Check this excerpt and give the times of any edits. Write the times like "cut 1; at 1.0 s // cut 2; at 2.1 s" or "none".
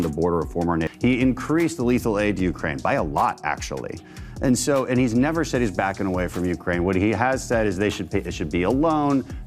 cut 1; at 0.9 s